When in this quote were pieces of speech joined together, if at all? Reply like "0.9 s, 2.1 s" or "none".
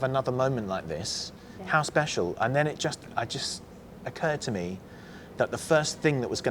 none